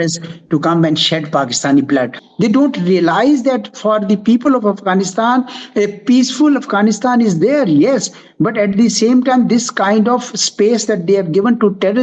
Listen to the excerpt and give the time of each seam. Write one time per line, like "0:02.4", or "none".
0:02.2